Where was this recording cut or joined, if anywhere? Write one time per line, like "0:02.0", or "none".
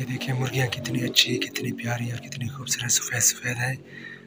none